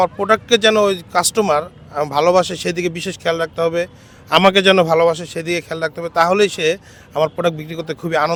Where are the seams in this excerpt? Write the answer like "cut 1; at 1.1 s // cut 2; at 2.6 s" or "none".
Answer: none